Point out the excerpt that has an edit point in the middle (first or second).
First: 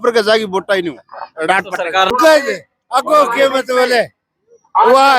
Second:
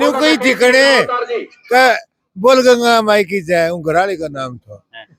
first